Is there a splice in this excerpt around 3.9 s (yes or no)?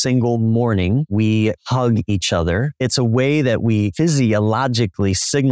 yes